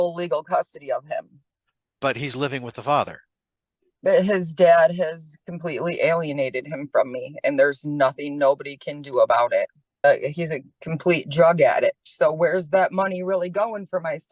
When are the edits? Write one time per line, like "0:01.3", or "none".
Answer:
0:10.0